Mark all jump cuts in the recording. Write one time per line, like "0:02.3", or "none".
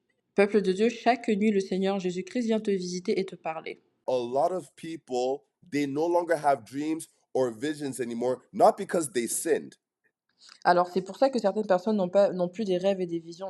0:04.1